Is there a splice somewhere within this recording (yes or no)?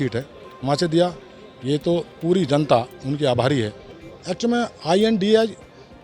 yes